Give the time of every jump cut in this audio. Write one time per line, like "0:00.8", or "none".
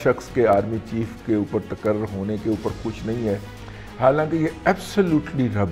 none